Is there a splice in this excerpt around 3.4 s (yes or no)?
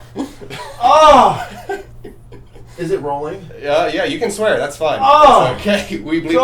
no